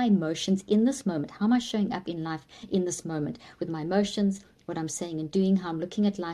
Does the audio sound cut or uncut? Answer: uncut